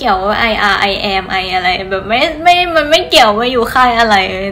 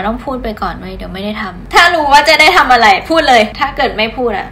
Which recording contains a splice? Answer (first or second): second